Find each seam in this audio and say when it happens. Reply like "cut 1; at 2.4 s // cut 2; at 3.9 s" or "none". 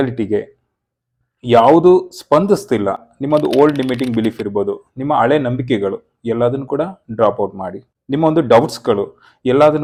none